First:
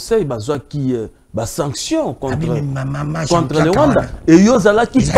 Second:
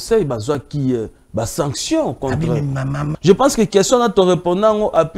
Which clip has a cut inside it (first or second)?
second